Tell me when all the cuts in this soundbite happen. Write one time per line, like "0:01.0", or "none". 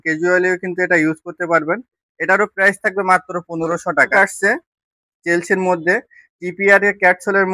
0:04.1